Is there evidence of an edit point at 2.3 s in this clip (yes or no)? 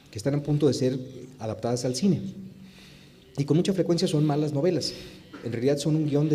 yes